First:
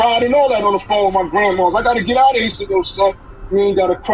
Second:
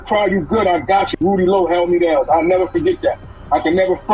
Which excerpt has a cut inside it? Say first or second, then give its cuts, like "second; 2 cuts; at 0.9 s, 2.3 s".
second; 1 cut; at 1.2 s